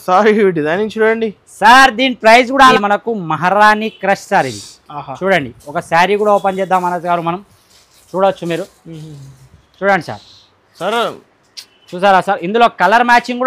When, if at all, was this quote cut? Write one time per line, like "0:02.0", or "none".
0:02.7

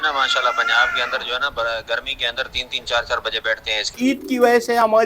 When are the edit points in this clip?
0:04.0

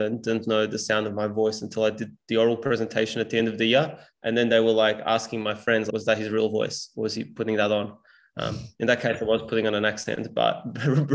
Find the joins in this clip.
0:05.9

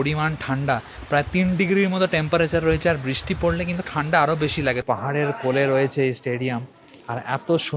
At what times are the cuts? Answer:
0:04.8

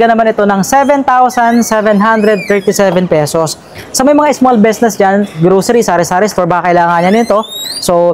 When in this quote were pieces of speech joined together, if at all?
none

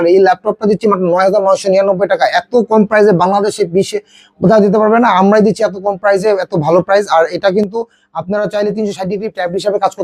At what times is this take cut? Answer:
none

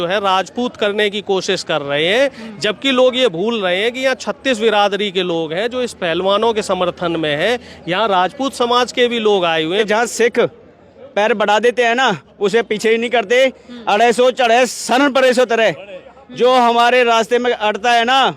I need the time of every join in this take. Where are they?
0:09.8

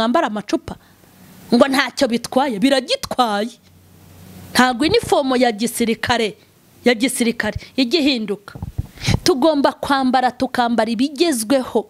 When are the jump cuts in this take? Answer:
none

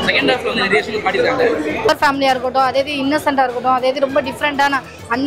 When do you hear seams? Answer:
0:01.9

